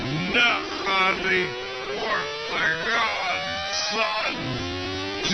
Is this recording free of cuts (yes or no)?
no